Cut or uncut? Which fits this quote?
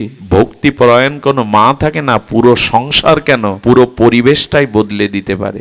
cut